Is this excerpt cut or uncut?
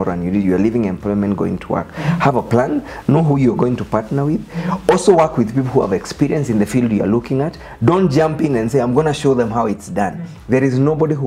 uncut